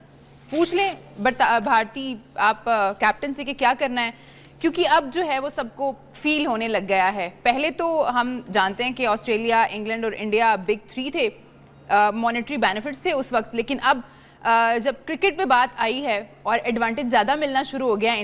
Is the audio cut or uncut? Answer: cut